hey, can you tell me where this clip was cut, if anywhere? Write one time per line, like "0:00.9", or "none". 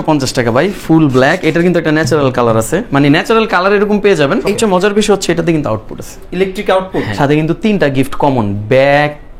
0:04.5
0:07.1